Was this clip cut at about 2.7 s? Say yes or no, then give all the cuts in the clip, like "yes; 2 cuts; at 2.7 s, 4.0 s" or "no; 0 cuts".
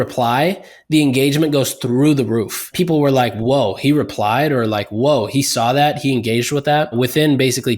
yes; 2 cuts; at 2.7 s, 6.9 s